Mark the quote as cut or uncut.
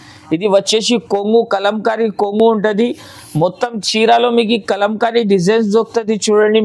uncut